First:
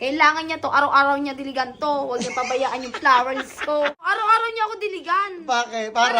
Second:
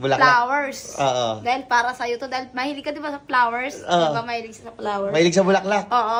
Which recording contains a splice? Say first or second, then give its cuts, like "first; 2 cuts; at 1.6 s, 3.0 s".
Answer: first; 1 cut; at 4.1 s